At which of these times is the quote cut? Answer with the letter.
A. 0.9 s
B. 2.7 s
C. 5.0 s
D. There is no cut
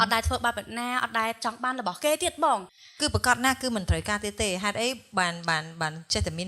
B